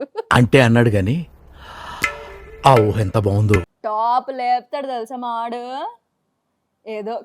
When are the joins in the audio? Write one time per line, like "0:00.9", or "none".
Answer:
0:03.7